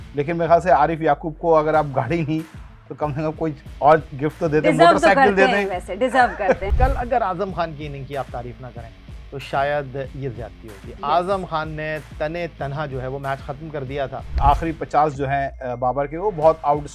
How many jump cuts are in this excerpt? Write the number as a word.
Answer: two